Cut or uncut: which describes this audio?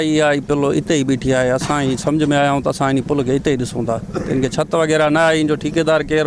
uncut